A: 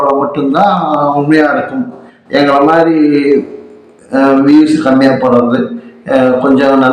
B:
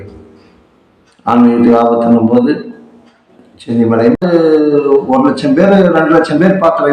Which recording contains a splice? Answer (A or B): B